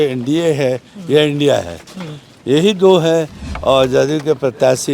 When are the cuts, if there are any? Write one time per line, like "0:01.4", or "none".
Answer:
0:03.4